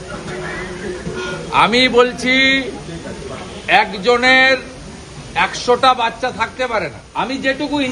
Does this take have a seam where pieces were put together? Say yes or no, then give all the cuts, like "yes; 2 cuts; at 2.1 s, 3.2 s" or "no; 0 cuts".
yes; 1 cut; at 7.0 s